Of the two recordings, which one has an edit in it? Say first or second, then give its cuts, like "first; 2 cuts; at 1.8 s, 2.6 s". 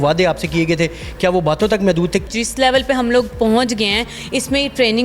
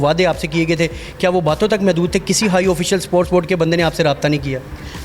first; 1 cut; at 2.3 s